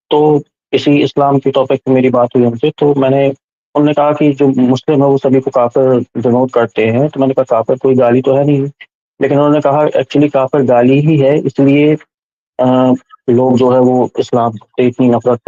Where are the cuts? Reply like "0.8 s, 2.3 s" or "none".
none